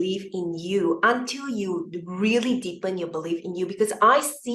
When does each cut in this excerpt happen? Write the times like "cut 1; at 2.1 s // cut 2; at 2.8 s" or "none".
none